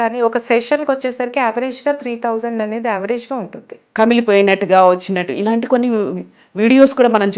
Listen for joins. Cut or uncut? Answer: cut